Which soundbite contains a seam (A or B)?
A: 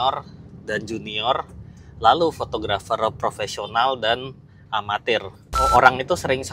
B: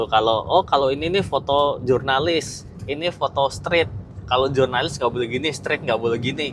A